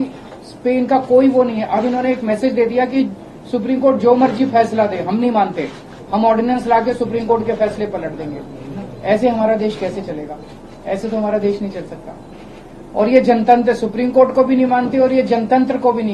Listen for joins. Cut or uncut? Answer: uncut